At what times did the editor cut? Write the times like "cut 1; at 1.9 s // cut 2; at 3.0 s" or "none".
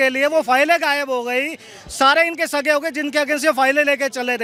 none